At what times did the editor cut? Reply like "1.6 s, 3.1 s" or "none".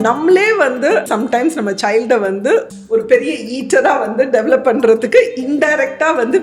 1.1 s, 2.7 s

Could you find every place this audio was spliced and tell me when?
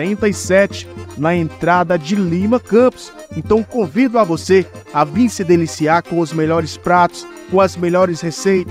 none

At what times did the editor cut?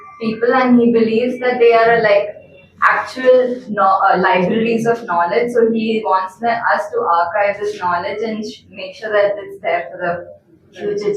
none

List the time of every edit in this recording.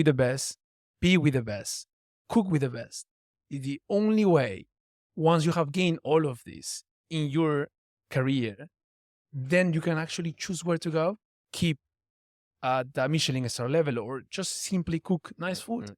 2.2 s

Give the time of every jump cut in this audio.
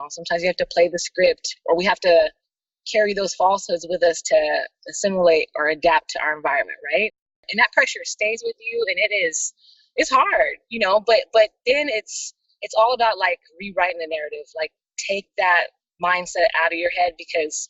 7.4 s

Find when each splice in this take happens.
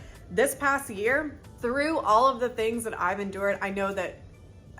1.4 s

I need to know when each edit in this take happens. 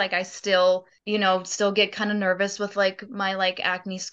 0.9 s

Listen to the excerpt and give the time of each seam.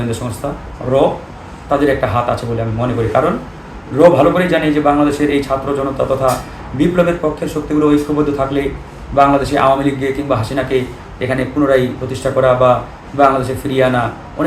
none

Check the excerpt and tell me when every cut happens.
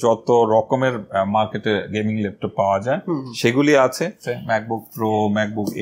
4.3 s

